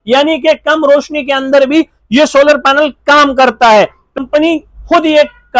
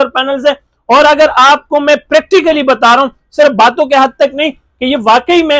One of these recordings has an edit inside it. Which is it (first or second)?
first